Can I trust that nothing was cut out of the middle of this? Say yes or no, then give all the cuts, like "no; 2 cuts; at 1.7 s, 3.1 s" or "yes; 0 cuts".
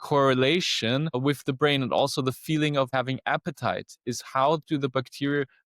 no; 2 cuts; at 1.1 s, 2.9 s